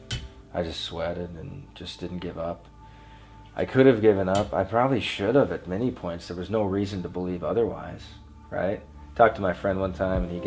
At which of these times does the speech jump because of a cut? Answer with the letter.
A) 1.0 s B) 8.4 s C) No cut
C